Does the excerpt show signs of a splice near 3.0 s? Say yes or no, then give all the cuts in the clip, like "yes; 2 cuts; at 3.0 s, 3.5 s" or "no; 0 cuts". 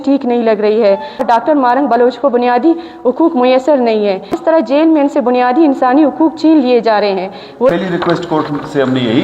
no; 3 cuts; at 1.2 s, 4.3 s, 7.7 s